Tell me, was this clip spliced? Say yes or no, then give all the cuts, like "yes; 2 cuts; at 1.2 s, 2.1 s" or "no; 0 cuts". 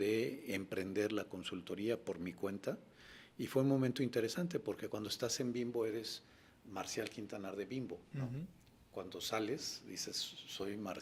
no; 0 cuts